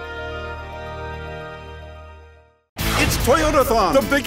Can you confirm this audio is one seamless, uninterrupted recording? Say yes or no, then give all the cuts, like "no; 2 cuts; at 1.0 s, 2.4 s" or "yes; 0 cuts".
no; 1 cut; at 2.3 s